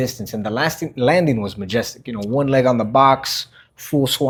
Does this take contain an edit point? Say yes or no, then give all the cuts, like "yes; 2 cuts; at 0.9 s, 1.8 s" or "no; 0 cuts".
no; 0 cuts